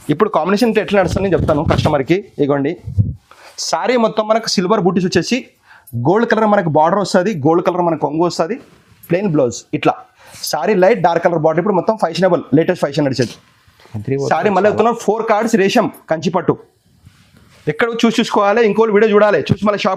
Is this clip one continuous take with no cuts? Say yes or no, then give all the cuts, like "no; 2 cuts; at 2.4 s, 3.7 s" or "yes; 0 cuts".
yes; 0 cuts